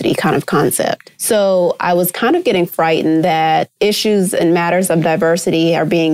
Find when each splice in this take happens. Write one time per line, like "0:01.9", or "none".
0:01.1
0:03.7